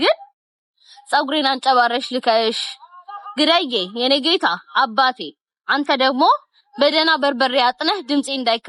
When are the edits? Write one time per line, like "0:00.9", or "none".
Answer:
none